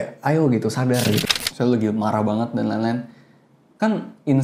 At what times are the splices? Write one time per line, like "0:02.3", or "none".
0:01.2